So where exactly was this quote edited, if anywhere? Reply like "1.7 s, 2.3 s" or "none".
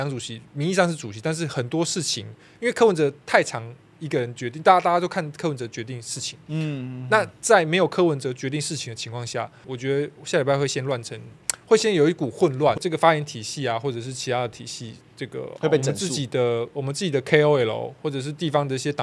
9.6 s, 12.8 s